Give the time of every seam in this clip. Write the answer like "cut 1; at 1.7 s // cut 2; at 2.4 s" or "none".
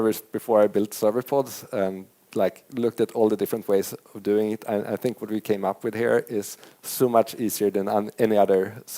none